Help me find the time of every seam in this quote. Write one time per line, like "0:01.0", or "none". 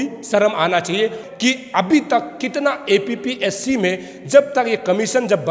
0:01.2